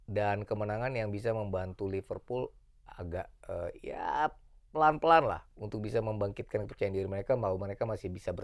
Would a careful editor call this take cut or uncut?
uncut